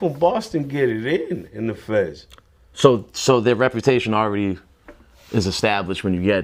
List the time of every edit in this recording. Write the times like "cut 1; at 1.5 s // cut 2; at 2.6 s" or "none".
none

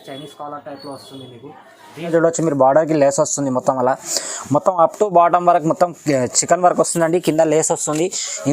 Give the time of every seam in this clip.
cut 1; at 2.1 s

